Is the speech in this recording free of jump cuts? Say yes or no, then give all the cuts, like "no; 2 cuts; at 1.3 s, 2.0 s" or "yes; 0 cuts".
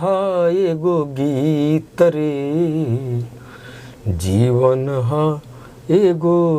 yes; 0 cuts